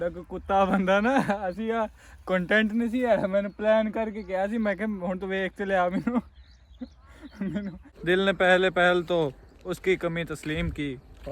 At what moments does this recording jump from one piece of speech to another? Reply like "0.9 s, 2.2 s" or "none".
7.9 s